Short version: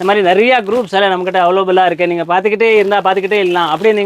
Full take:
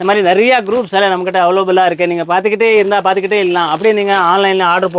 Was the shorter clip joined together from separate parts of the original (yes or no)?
no